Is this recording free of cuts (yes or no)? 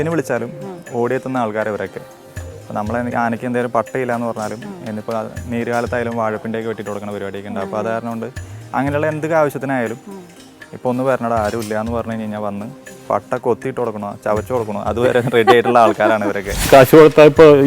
no